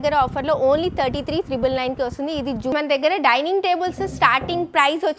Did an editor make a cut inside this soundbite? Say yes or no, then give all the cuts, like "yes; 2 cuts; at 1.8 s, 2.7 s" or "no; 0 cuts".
yes; 1 cut; at 2.7 s